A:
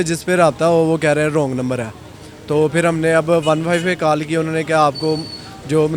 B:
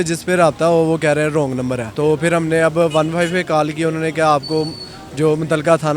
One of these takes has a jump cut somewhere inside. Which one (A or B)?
B